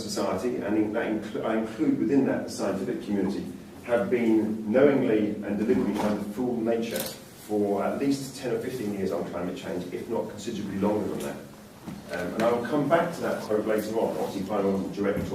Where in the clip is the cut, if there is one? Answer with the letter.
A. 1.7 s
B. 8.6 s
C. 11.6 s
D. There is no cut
B